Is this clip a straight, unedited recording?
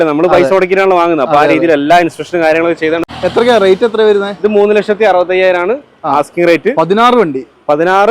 no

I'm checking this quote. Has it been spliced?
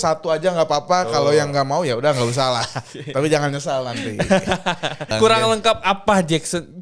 yes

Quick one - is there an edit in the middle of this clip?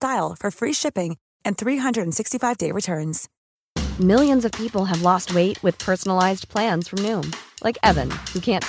yes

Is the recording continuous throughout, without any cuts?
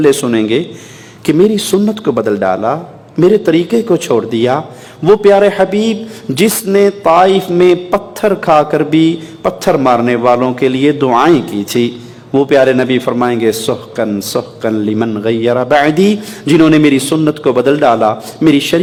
yes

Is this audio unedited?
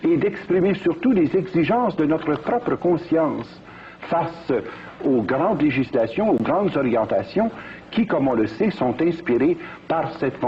yes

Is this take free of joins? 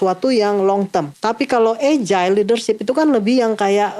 no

